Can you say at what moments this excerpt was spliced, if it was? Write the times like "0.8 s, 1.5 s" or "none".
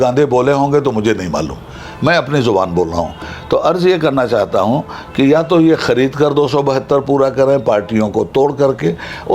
none